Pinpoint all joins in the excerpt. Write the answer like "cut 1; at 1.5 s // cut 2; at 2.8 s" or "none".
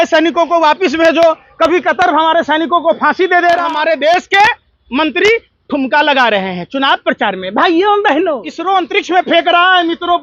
cut 1; at 3.6 s // cut 2; at 8.5 s